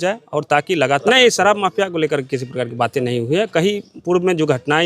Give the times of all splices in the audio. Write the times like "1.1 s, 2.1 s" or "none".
1.0 s